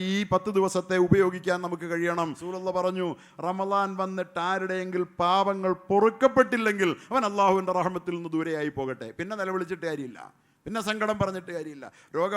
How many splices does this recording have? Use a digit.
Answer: 1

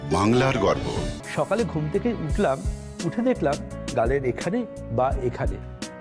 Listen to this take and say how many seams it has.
1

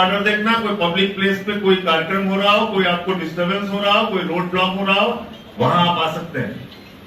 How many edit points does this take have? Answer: 0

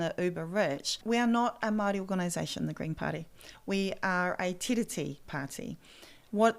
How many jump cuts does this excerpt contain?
1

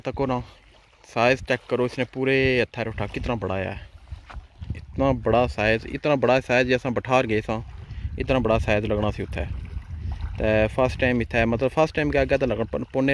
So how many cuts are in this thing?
0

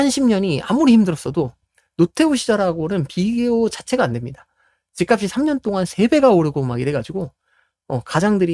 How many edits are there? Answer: 0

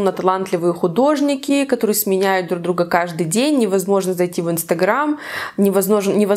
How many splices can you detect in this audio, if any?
0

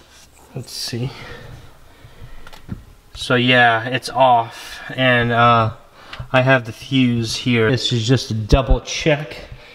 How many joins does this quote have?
1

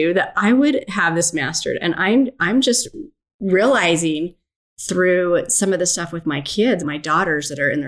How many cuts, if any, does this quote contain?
1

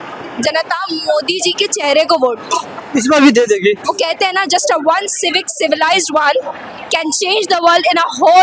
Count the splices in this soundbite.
1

